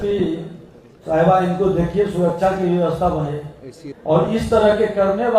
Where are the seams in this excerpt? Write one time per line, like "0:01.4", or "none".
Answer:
0:03.8